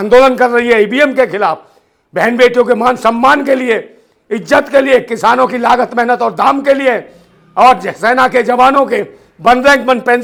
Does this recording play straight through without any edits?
yes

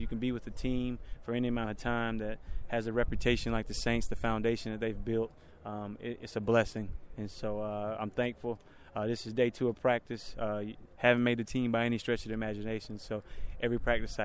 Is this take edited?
no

